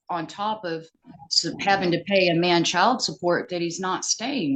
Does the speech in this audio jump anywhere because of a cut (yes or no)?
no